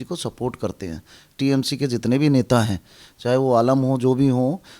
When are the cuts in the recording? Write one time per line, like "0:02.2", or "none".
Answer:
0:01.4